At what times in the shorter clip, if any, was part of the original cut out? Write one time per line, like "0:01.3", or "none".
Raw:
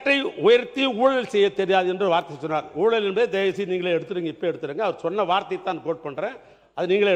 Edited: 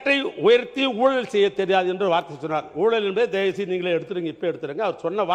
none